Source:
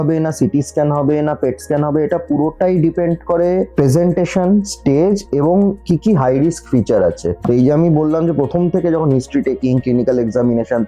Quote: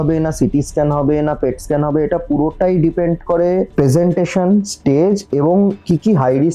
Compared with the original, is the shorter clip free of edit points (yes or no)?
yes